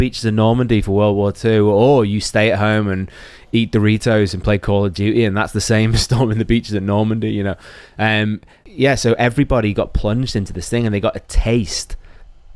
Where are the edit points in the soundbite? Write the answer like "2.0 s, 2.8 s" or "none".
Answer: none